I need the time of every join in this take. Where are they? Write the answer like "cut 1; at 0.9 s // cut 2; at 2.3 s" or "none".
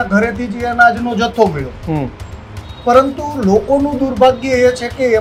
none